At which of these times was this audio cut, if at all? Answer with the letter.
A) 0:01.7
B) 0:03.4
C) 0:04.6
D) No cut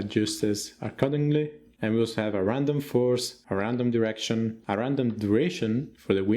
A